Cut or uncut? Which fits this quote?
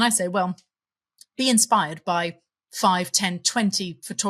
cut